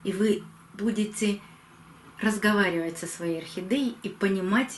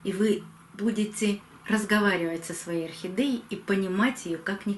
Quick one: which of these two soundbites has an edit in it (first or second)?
second